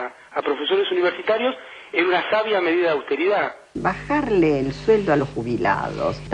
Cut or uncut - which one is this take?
cut